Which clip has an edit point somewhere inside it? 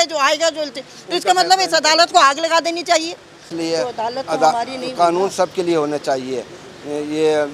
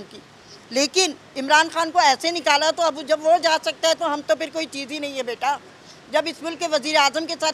first; 1 cut; at 3.5 s

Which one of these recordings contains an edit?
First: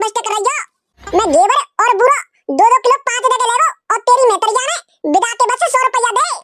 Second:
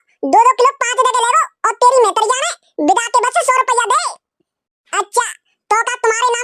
first; 1 cut; at 1.0 s

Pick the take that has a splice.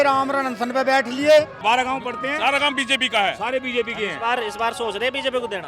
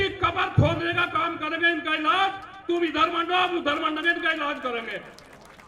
first; 1 cut; at 1.5 s

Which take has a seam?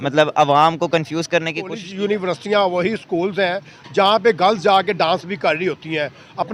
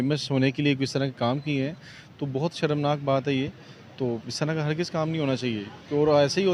first; 1 cut; at 1.8 s

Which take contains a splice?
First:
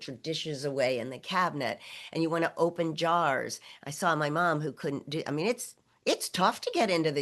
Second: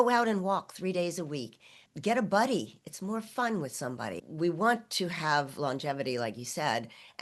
second; 2 cuts; at 1.8 s, 4.2 s

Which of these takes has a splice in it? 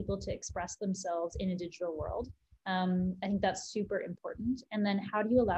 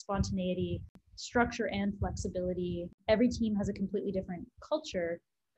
second; 2 cuts; at 1.0 s, 3.0 s

